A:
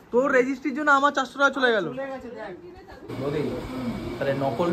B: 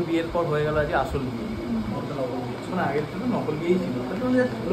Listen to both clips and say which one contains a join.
A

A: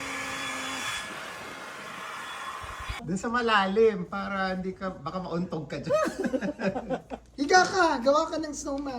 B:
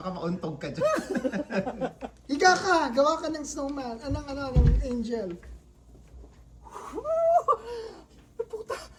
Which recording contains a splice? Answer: A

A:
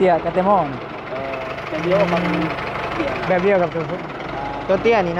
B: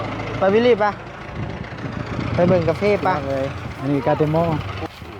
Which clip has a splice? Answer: B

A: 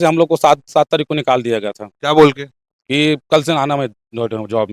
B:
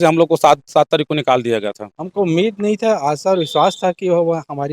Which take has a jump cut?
B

